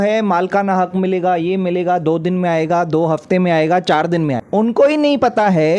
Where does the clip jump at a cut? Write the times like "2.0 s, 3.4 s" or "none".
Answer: 4.4 s